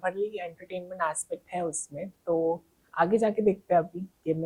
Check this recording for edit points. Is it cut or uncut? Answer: uncut